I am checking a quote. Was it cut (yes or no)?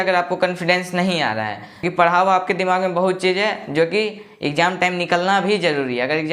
yes